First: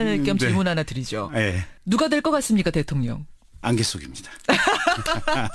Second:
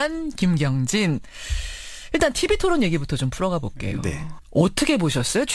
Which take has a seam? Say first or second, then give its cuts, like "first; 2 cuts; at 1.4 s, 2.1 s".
second; 1 cut; at 2.7 s